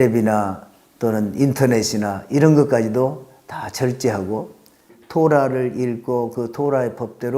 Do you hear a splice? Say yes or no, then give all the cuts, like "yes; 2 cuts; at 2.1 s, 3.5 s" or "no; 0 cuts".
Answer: yes; 1 cut; at 5.0 s